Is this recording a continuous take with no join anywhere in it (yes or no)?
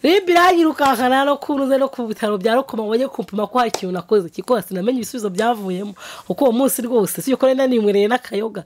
yes